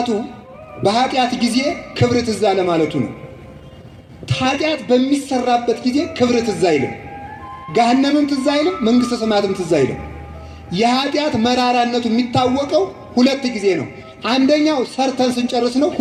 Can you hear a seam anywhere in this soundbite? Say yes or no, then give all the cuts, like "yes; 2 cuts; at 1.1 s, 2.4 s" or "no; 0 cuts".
no; 0 cuts